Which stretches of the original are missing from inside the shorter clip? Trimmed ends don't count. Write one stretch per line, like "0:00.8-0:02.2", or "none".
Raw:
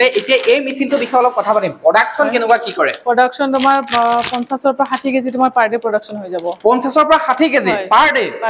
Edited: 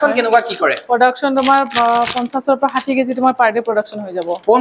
none